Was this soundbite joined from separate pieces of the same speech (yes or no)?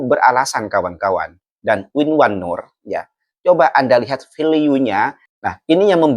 yes